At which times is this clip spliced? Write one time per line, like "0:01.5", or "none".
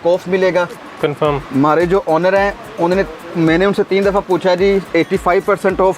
none